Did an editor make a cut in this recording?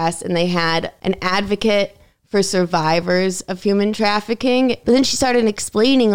yes; 2 cuts; at 0.9 s, 4.8 s

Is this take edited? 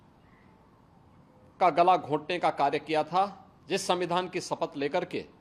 yes; 1 cut; at 3.5 s

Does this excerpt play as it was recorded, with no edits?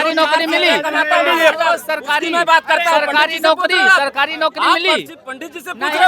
yes; 0 cuts

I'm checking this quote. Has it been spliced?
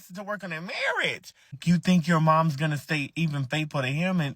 yes; 1 cut; at 1.5 s

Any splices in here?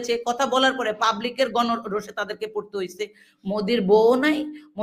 yes; 1 cut; at 3.2 s

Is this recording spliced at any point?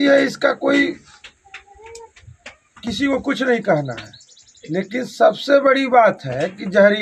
no; 0 cuts

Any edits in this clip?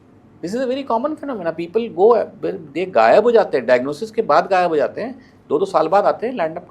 no; 0 cuts

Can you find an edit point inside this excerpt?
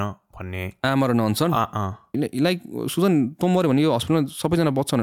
yes; 1 cut; at 2.1 s

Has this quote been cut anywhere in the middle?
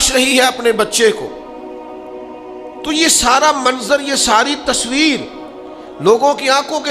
yes; 2 cuts; at 1.3 s, 2.7 s

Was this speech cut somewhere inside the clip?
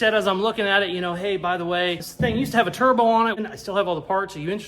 yes; 2 cuts; at 2.1 s, 3.4 s

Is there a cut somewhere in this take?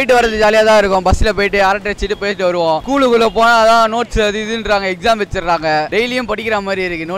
no; 0 cuts

